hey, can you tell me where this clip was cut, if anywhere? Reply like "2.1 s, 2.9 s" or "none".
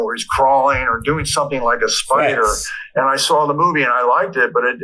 0.9 s